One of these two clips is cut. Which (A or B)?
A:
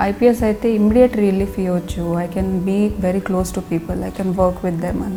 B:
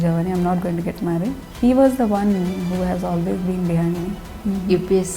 B